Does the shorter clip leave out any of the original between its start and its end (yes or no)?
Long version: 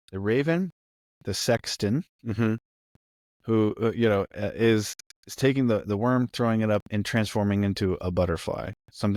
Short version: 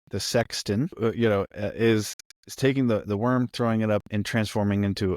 yes